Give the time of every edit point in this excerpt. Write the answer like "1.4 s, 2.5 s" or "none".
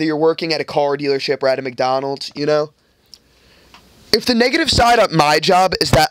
none